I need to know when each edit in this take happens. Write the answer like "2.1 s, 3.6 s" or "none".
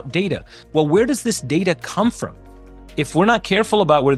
none